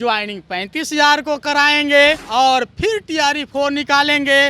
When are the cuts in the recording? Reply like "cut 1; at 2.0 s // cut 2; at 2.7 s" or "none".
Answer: cut 1; at 2.2 s